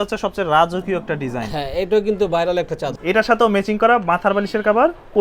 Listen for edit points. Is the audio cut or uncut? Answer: cut